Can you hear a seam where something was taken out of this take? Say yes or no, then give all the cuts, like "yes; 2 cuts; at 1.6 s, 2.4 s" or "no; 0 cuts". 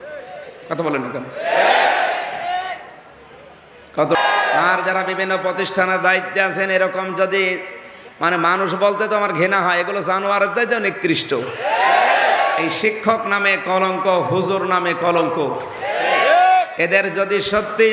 yes; 1 cut; at 4.1 s